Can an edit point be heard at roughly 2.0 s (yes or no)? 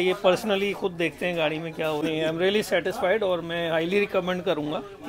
yes